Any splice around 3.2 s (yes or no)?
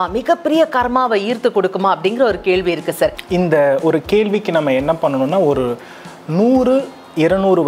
yes